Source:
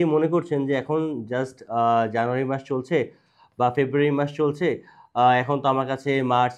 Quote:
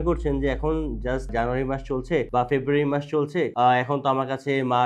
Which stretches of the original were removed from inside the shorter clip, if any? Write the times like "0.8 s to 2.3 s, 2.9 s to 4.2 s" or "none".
1.6 s to 2.1 s, 3.1 s to 3.5 s, 4.8 s to 5.1 s